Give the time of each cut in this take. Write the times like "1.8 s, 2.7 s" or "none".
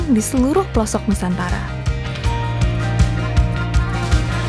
none